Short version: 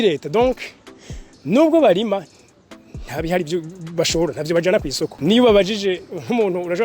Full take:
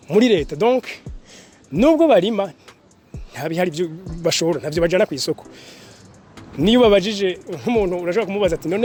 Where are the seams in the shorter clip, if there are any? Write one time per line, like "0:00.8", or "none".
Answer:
0:05.1